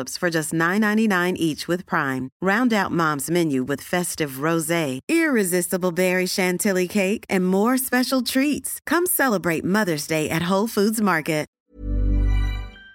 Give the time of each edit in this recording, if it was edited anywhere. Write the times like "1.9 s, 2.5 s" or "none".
11.6 s

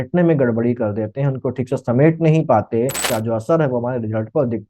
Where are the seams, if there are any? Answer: 3.0 s

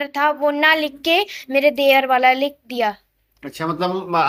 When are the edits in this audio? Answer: none

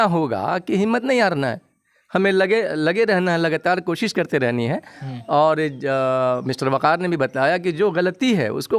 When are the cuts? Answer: none

